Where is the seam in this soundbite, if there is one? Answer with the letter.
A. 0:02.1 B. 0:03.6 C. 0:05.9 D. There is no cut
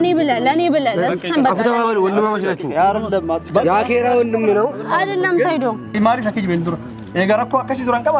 C